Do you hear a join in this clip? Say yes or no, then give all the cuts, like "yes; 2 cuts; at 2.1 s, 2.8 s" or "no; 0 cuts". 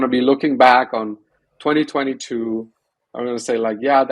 no; 0 cuts